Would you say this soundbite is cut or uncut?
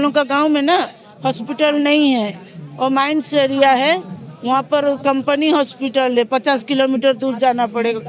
uncut